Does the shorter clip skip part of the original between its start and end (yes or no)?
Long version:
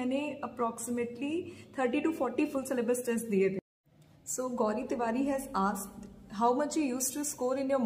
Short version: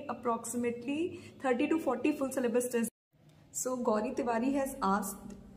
yes